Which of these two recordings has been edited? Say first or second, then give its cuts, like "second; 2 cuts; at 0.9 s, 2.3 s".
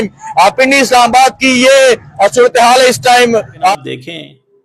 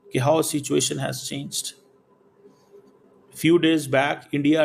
first; 1 cut; at 3.7 s